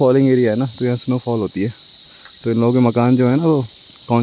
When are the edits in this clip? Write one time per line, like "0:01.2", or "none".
none